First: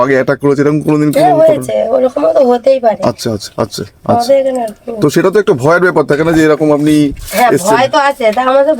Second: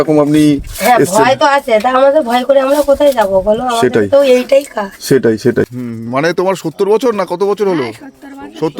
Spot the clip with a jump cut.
second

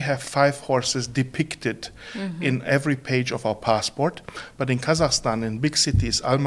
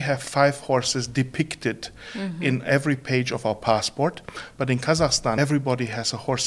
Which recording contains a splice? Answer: second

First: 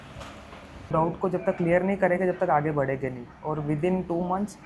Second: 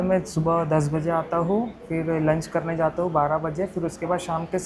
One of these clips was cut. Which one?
first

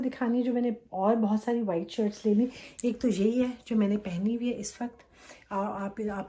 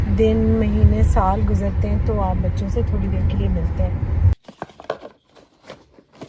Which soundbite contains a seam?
second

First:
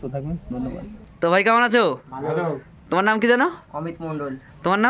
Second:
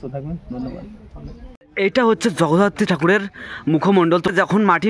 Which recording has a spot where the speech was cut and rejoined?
first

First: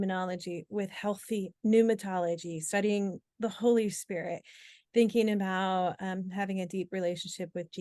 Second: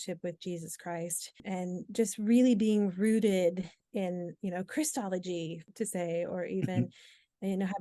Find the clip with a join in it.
second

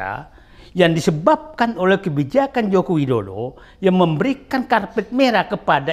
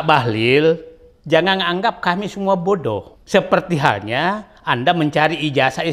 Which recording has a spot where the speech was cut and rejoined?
second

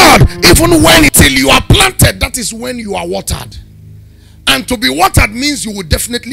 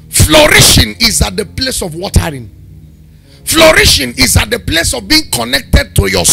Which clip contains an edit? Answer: first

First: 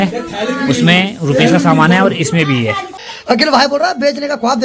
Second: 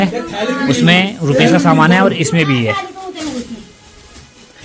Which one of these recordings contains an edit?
first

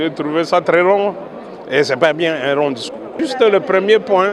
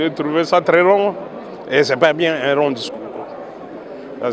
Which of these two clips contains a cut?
first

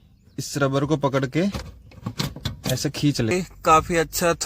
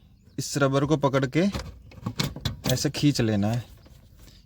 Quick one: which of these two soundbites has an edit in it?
first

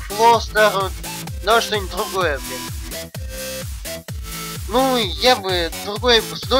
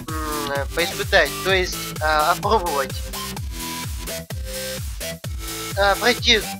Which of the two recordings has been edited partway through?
first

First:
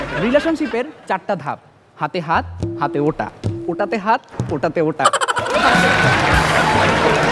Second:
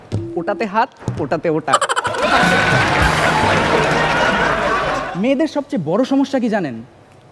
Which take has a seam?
second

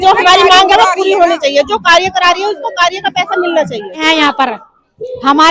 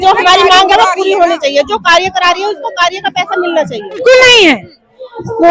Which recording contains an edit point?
second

